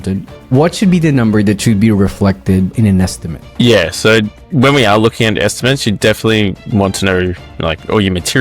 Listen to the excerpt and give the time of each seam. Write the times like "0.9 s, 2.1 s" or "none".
2.7 s